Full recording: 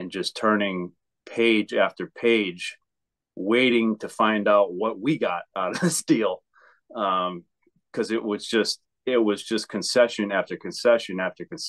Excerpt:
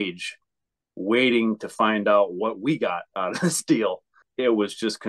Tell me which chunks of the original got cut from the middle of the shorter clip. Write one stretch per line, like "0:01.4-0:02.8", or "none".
0:06.6-0:08.9